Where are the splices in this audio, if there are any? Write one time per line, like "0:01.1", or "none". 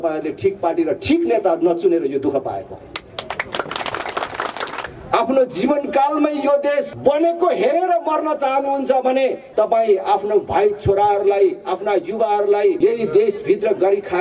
0:04.8
0:06.9
0:09.4
0:12.8

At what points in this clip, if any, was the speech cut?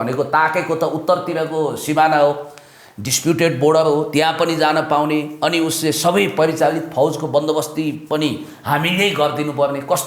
none

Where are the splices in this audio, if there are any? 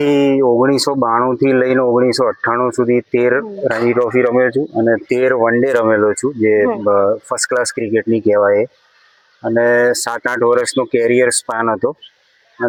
none

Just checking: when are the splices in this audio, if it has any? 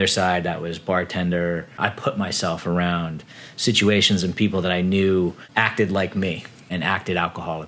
0:01.7
0:05.4
0:06.6

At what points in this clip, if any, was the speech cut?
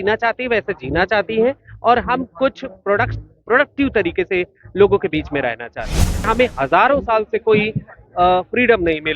0:06.3

